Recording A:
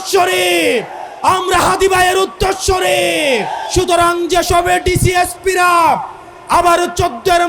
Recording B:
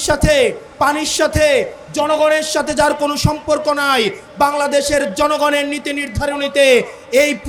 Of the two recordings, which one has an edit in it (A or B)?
A